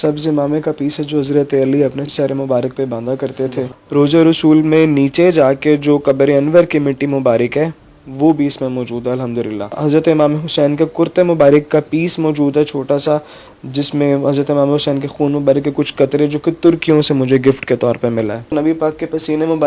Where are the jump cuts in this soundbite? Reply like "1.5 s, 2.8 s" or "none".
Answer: 2.1 s, 3.8 s, 9.7 s, 18.4 s